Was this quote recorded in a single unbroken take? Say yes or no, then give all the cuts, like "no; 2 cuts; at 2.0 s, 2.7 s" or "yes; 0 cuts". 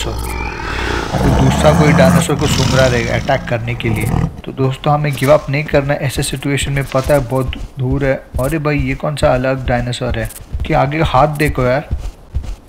yes; 0 cuts